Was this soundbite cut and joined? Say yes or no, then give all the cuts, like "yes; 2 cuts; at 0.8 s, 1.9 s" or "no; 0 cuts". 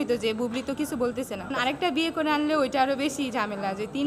yes; 1 cut; at 1.5 s